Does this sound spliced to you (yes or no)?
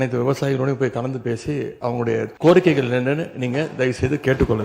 yes